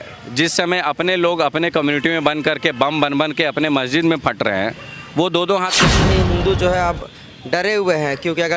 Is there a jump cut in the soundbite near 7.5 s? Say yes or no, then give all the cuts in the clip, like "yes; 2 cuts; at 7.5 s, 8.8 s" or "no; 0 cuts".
no; 1 cut; at 5.9 s